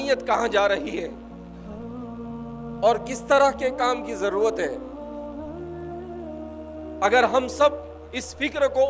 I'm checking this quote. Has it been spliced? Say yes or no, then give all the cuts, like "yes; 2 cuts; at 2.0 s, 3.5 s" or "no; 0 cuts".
yes; 4 cuts; at 1.1 s, 2.5 s, 4.8 s, 7.0 s